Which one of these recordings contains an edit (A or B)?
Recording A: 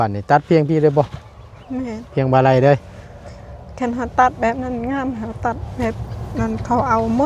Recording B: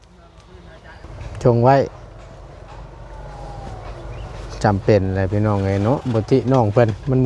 B